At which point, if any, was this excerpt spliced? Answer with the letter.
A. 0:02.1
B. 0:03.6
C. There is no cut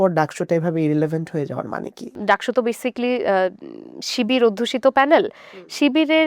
A